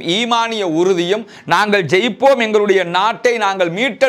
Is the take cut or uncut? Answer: uncut